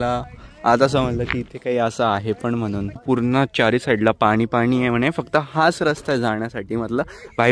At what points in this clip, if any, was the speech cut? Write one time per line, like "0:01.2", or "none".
0:03.0